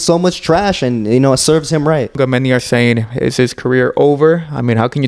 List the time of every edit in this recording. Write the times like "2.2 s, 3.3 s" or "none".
2.1 s